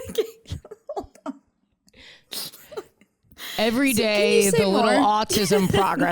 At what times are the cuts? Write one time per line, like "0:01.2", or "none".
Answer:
0:03.5